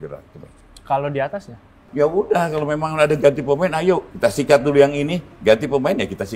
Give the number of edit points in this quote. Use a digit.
2